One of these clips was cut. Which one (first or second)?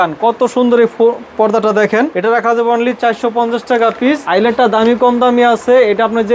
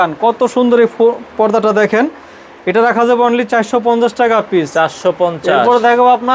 first